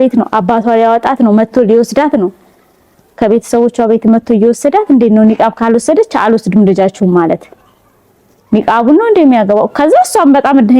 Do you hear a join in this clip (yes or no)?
no